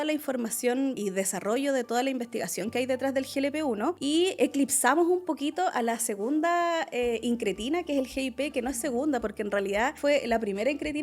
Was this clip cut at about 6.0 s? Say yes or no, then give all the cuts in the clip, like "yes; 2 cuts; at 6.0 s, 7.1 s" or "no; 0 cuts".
no; 3 cuts; at 1.0 s, 4.0 s, 10.0 s